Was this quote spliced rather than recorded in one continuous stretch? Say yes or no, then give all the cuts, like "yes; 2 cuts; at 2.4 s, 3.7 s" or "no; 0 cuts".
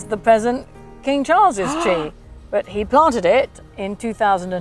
no; 0 cuts